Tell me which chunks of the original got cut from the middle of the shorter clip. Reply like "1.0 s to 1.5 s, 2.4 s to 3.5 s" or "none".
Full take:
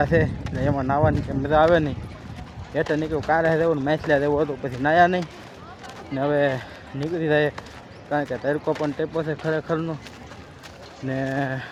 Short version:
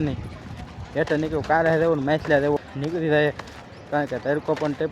4.4 s to 6.8 s